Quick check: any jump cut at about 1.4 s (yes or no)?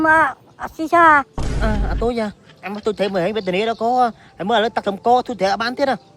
yes